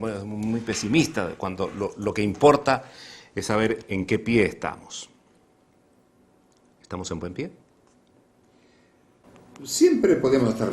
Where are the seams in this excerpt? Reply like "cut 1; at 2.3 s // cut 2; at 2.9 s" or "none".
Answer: cut 1; at 6.2 s